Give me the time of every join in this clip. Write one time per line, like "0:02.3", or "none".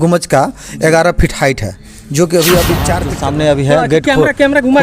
0:03.1